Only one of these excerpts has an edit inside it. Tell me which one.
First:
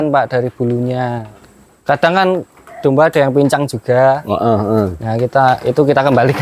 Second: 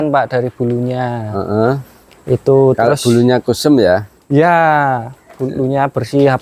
first; 1 cut; at 1.2 s

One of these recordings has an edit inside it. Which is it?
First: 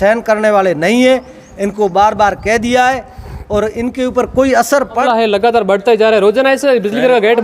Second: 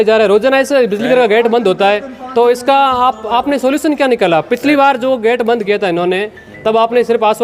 first; 1 cut; at 4.9 s

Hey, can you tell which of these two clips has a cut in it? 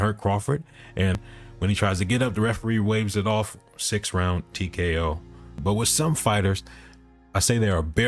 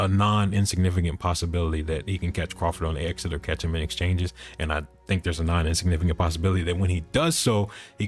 first; 2 cuts; at 1.2 s, 5.6 s

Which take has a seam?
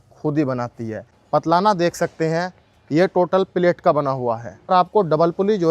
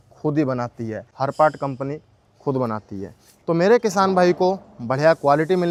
first; 2 cuts; at 1.1 s, 4.7 s

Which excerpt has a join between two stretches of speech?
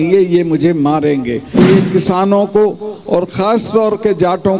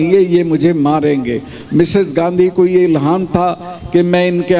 first; 1 cut; at 1.5 s

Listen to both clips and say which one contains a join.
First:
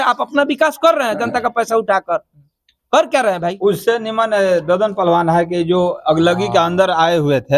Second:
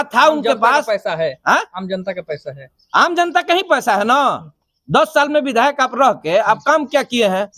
first; 1 cut; at 3.6 s

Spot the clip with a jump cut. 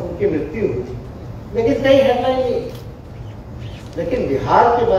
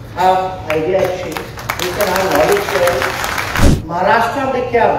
second; 1 cut; at 3.6 s

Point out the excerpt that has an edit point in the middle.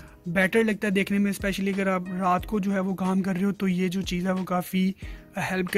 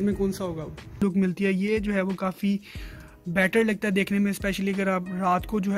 second; 1 cut; at 1.0 s

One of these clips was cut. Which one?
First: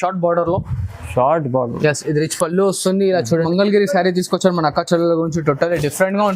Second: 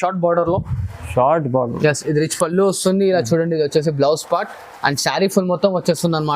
first; 1 cut; at 3.4 s

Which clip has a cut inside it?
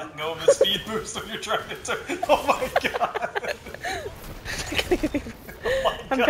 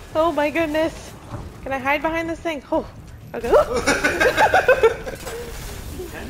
first; 1 cut; at 3.9 s

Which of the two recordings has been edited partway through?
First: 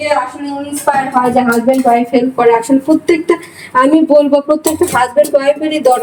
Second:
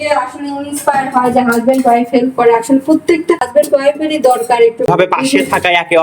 second; 2 cuts; at 3.5 s, 4.9 s

